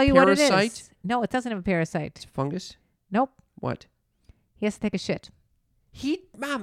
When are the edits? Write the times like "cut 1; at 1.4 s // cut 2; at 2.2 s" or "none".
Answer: none